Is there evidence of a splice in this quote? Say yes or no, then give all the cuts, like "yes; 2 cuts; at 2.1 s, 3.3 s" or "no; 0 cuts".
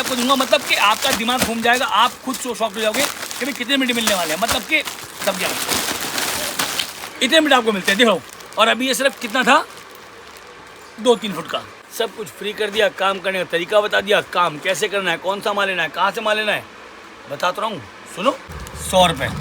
yes; 4 cuts; at 5.2 s, 8.3 s, 11.8 s, 18.5 s